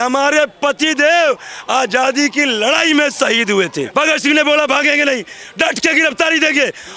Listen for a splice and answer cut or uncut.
cut